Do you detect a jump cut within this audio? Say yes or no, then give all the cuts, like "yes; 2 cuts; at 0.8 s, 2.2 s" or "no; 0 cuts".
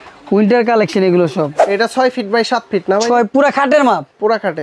yes; 1 cut; at 1.6 s